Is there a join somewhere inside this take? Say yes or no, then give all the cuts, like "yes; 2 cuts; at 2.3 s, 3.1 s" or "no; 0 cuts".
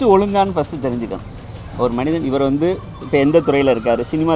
no; 0 cuts